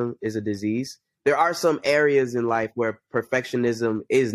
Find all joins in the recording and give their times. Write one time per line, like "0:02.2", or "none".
0:01.1